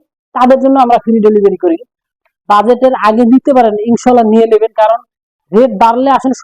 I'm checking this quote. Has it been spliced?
yes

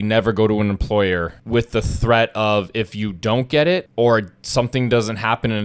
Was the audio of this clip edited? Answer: yes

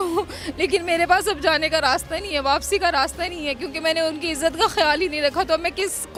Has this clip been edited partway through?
no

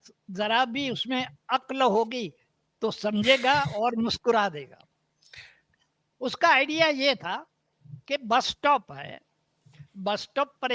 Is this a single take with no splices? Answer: yes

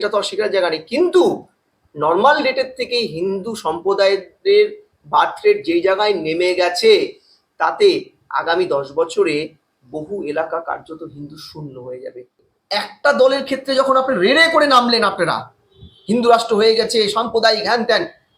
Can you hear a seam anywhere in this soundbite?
yes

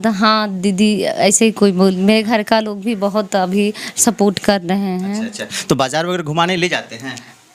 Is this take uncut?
yes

